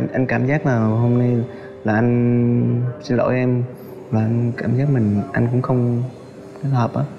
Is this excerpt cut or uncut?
uncut